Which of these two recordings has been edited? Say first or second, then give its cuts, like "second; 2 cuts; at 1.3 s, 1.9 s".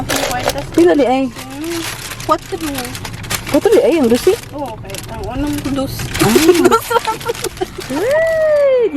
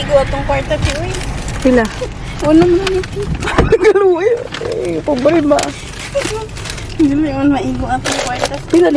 first; 1 cut; at 7.8 s